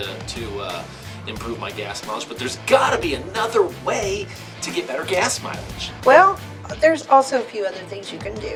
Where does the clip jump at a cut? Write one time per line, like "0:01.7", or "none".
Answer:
none